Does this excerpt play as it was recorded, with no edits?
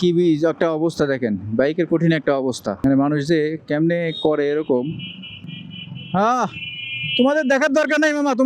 no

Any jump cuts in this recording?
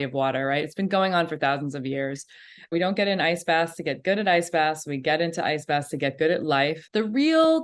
yes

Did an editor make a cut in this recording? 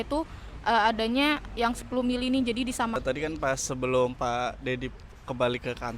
yes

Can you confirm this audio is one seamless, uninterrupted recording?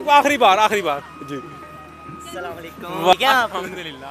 yes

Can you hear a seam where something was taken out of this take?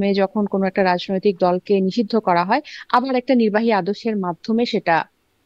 no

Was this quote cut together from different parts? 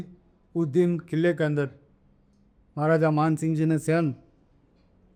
no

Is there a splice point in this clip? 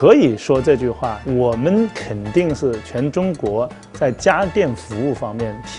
no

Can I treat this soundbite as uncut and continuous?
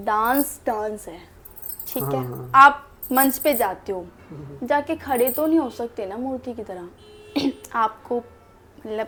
yes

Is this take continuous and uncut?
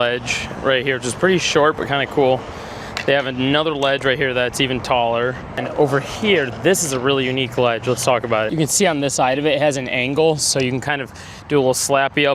yes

